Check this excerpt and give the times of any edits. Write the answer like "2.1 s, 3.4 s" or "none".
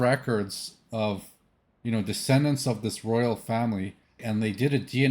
4.1 s

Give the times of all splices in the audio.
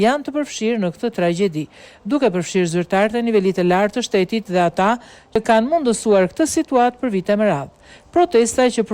5.4 s

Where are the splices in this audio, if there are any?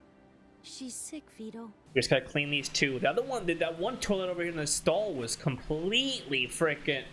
1.8 s

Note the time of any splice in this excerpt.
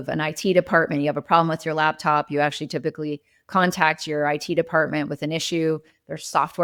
none

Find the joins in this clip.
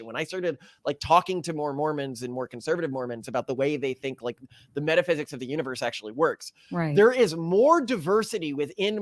none

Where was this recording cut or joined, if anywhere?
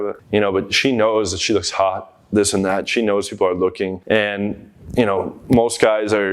4.0 s

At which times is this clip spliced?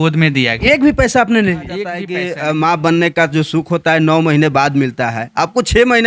2.1 s

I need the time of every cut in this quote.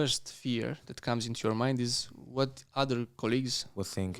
none

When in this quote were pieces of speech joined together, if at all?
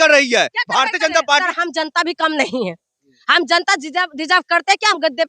1.4 s

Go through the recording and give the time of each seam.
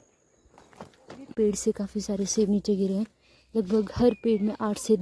1.3 s

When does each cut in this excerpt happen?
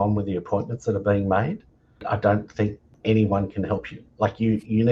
2.0 s, 3.0 s

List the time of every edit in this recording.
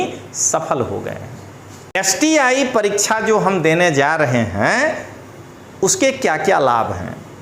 2.0 s

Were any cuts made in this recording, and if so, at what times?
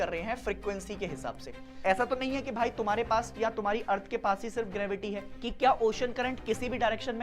1.6 s, 5.3 s

